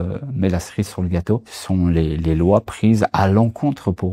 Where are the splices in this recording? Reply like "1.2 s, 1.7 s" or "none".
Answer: 1.5 s

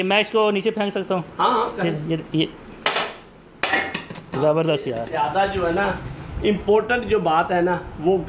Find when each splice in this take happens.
5.0 s

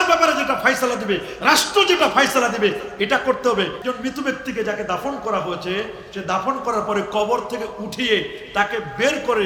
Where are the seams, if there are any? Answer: 3.8 s

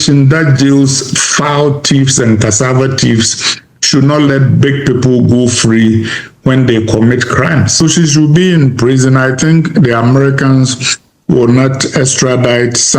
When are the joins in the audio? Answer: 7.8 s

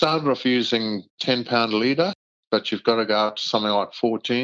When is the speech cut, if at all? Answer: 1.1 s, 2.3 s

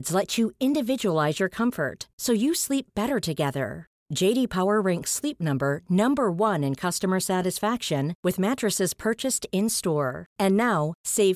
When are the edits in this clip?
none

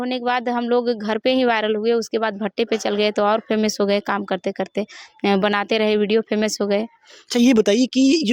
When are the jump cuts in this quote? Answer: none

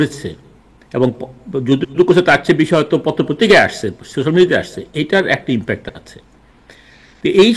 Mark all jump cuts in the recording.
none

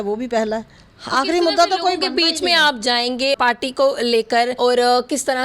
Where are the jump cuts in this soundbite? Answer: 3.4 s, 4.6 s

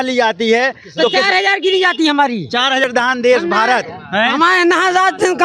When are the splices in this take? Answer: 2.9 s

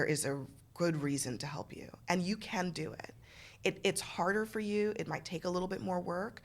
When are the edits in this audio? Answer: none

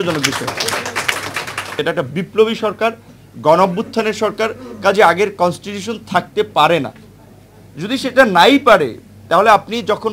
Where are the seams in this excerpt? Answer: 1.7 s

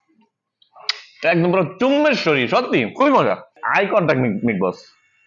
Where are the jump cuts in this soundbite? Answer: 3.6 s

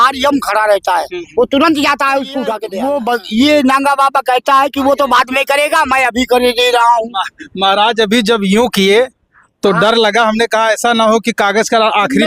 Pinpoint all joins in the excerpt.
2.6 s

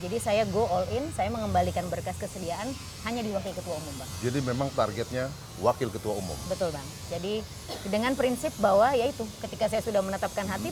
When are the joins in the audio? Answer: none

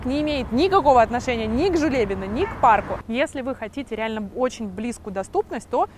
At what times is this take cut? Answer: 3.0 s

